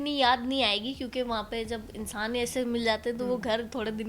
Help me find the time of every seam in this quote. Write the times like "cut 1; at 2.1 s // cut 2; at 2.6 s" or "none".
none